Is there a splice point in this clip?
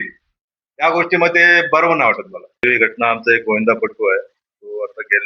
yes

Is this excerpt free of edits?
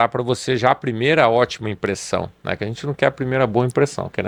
yes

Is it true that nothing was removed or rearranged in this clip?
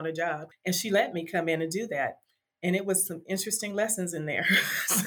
yes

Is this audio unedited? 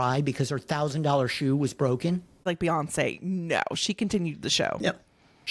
no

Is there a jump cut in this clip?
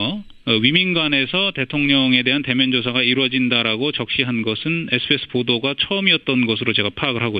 yes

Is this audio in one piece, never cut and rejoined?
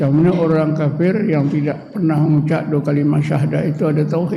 yes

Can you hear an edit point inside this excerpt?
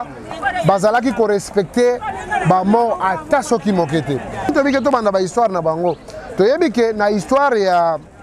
yes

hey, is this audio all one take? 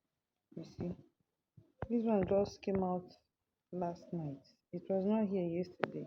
yes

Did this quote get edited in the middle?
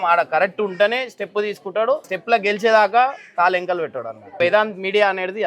yes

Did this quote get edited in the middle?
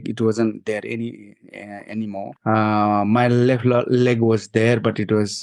yes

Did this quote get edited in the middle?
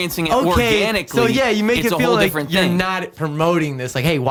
no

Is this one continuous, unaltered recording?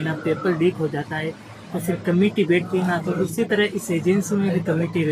yes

